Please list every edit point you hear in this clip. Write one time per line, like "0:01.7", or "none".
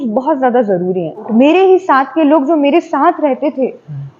0:01.3